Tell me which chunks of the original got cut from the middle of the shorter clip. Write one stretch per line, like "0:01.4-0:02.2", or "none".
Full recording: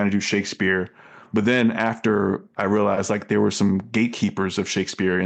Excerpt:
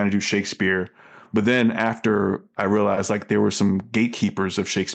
none